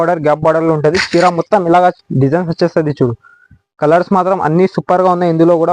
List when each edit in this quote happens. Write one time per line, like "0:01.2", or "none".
none